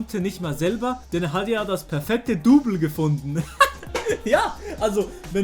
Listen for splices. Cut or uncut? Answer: cut